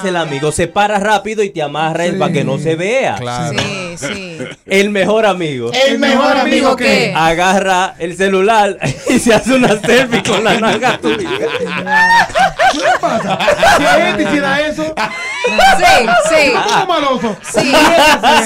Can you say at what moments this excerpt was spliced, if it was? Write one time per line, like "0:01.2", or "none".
none